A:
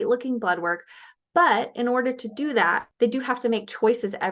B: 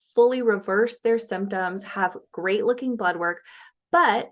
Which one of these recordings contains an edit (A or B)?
A